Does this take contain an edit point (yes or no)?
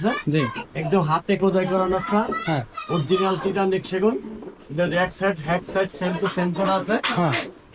no